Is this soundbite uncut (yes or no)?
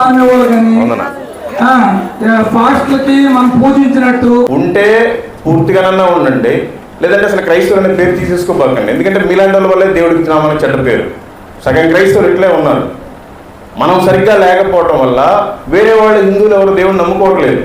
no